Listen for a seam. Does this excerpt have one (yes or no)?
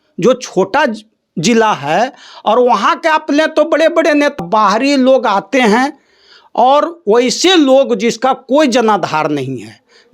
yes